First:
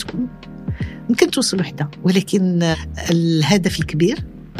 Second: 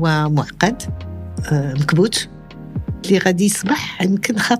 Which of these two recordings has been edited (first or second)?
first